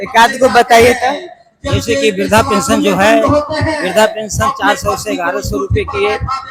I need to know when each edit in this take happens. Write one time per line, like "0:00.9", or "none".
none